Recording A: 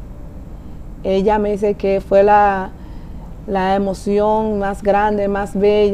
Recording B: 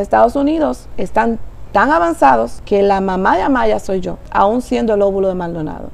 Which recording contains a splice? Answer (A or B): B